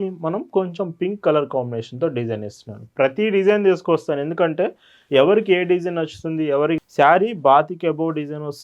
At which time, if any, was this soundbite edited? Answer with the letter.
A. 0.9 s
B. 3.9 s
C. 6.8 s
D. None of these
C